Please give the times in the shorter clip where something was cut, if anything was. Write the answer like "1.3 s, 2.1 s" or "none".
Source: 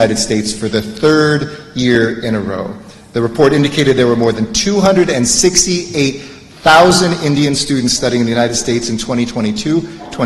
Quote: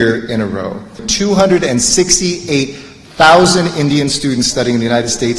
1.0 s